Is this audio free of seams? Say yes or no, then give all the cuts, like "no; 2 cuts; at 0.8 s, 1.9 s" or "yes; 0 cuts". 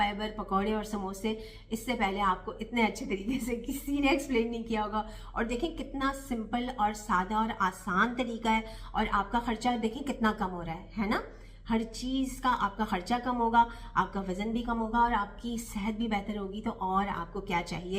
yes; 0 cuts